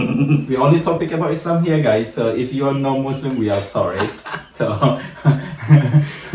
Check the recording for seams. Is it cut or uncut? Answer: uncut